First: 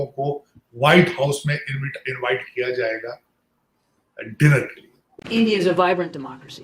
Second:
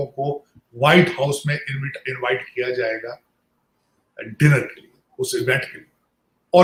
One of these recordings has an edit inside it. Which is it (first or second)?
first